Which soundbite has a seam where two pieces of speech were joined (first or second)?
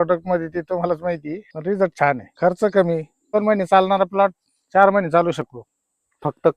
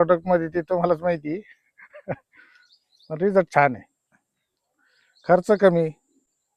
first